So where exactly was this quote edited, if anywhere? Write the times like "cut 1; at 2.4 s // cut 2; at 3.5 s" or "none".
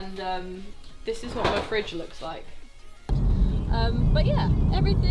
cut 1; at 3.1 s